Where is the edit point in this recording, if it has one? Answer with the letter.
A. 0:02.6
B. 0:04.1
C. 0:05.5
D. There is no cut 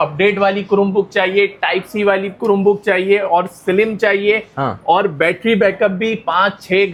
D